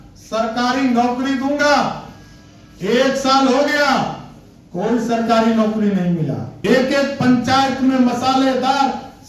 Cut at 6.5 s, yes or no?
yes